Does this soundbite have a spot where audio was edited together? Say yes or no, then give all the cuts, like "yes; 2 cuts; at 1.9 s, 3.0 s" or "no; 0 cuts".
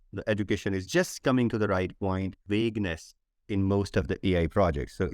yes; 1 cut; at 2.4 s